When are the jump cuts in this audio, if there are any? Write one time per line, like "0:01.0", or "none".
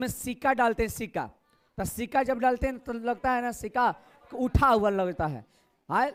none